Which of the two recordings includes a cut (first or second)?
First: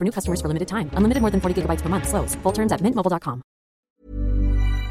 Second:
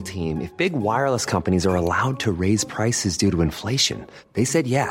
first